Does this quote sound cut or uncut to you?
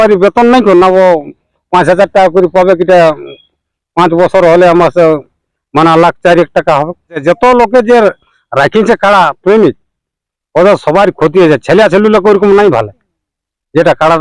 cut